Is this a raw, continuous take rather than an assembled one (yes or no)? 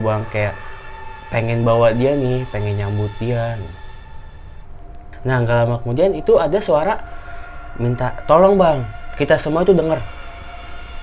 no